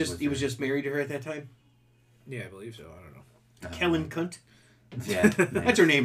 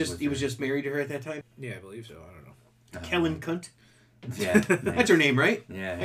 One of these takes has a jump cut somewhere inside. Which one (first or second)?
second